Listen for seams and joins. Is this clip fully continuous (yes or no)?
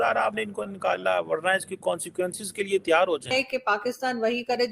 no